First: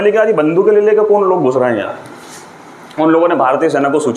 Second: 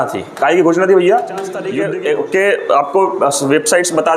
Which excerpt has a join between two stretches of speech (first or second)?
second